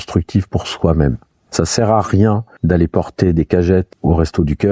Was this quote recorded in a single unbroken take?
no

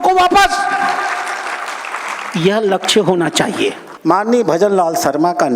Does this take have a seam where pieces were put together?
yes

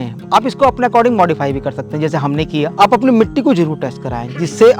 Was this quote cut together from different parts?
yes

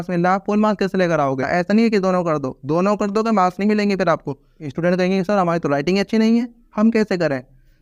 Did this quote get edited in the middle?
yes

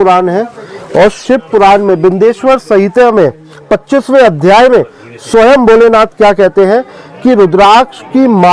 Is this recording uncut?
yes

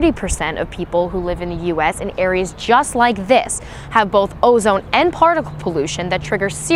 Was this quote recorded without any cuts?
yes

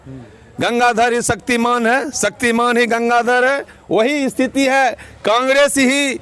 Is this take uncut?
yes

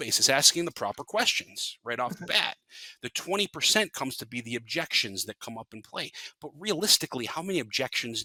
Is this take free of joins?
yes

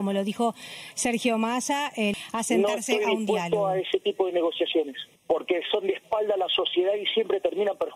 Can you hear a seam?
yes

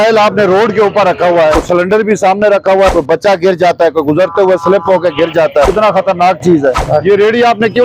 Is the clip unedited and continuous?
no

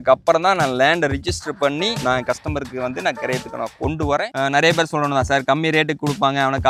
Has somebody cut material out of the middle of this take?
yes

